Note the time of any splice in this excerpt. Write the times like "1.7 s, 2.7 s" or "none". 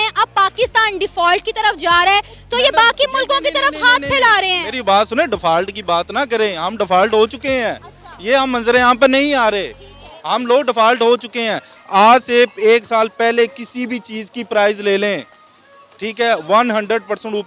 none

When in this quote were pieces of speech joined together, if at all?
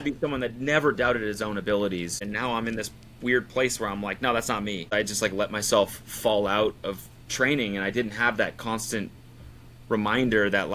2.2 s, 4.9 s

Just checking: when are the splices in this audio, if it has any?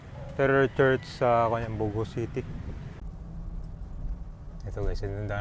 3.1 s

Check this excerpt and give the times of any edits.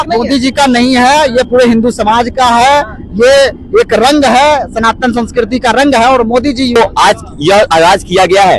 6.8 s

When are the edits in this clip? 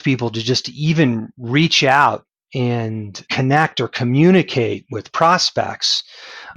none

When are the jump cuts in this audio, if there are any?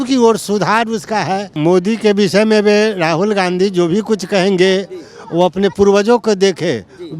1.5 s

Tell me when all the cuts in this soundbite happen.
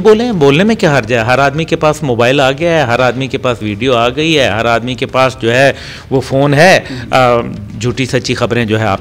none

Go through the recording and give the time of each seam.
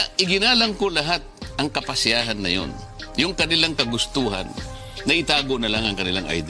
none

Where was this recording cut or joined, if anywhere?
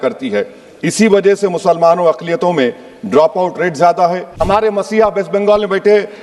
4.4 s

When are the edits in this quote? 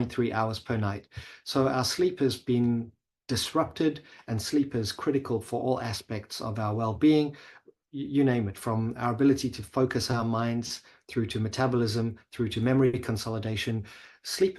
none

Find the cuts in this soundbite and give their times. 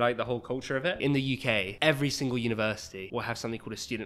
1.1 s, 2.9 s

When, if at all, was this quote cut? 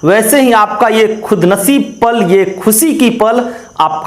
none

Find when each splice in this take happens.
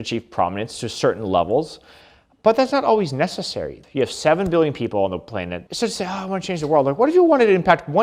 3.7 s, 5.6 s

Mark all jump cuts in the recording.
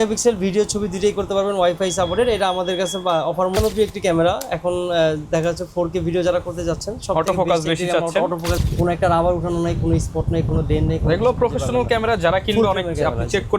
3.6 s, 8.6 s

